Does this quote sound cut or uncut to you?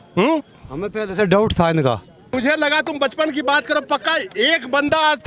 cut